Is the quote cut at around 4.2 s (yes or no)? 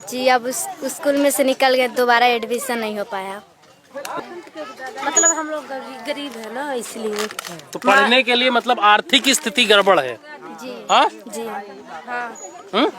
yes